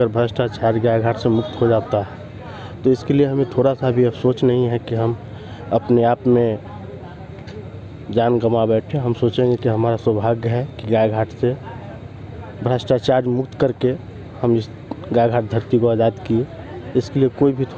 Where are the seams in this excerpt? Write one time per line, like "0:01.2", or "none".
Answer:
none